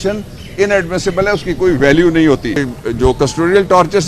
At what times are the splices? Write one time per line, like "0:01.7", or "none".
0:02.7